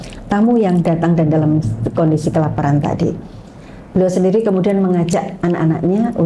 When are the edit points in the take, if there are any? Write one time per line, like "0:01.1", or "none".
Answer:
none

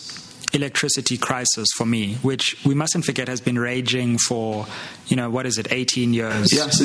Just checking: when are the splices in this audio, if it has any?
none

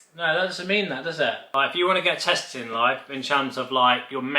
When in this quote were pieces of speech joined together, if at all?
0:01.4

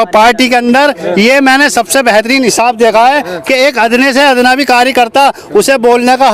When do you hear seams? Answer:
none

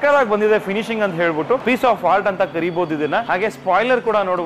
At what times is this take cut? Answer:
0:01.6
0:03.3

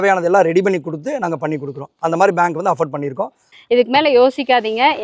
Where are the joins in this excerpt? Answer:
0:03.5

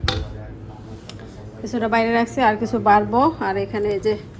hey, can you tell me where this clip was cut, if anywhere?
none

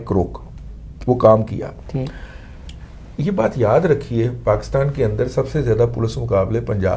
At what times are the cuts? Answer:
none

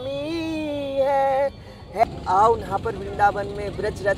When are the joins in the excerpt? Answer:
0:02.0

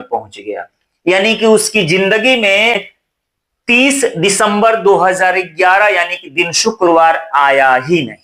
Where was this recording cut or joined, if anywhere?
0:02.8

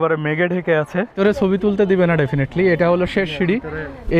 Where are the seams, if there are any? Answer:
0:01.2

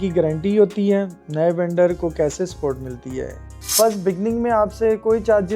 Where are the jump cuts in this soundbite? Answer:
0:03.7

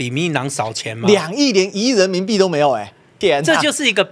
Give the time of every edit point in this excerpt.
0:03.1

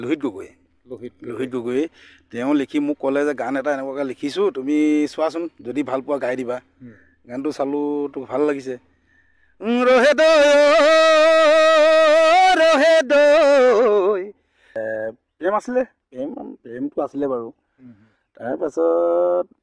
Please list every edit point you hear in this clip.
0:14.8

